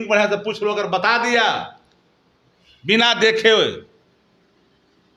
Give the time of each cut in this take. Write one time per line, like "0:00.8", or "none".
none